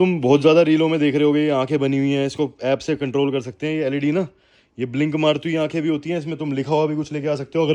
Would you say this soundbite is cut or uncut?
uncut